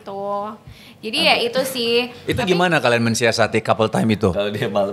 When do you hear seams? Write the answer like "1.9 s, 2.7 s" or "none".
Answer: none